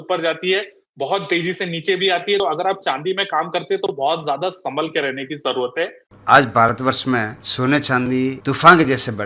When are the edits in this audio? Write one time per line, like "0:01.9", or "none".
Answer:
0:02.4
0:06.0
0:07.4
0:08.4